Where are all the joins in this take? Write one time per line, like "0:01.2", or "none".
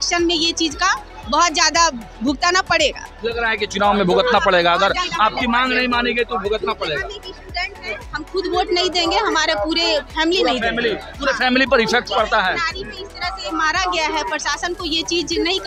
none

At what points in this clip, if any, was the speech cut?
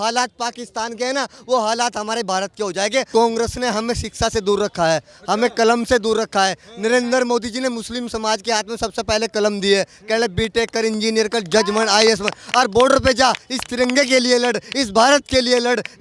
0:03.1

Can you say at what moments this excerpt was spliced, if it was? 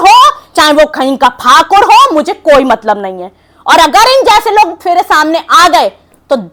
none

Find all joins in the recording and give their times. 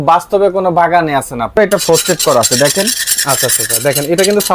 0:01.6

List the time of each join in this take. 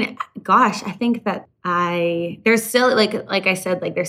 0:01.4

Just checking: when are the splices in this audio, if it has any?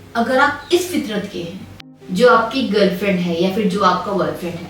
0:01.6

